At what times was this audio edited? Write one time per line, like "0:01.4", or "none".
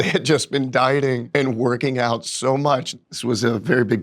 0:01.2
0:02.9